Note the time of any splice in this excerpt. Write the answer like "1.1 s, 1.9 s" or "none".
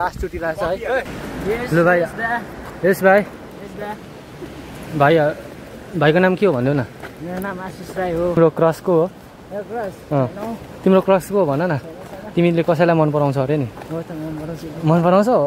1.1 s, 8.4 s